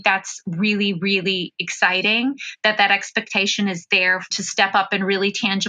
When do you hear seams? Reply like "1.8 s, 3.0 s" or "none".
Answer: 4.3 s